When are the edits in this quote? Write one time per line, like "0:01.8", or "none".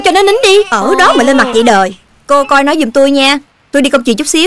0:02.1